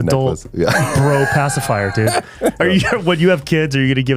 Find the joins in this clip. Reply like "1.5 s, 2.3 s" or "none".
2.6 s